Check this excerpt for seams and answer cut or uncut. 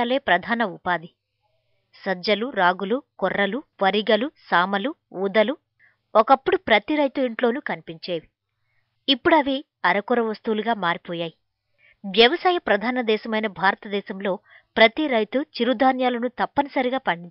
uncut